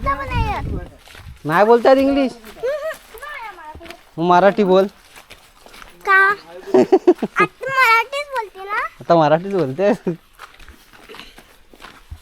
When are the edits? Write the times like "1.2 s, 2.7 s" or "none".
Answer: 10.0 s